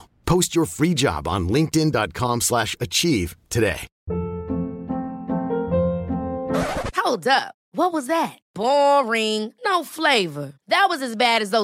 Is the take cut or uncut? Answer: cut